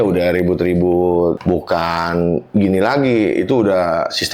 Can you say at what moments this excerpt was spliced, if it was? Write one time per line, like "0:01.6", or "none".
0:01.4

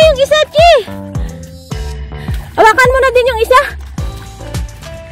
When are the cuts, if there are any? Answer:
0:00.9
0:02.4
0:03.7

